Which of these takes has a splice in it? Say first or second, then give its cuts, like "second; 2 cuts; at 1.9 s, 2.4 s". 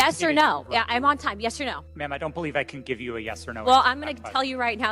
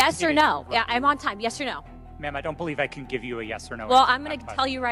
first; 1 cut; at 1.9 s